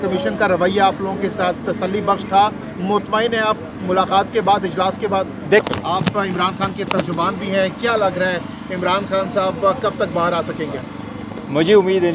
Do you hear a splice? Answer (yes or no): yes